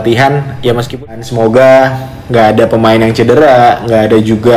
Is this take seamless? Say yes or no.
no